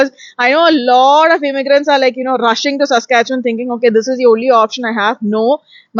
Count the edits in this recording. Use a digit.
0